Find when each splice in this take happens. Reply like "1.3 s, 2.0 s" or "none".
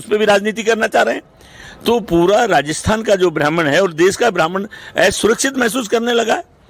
none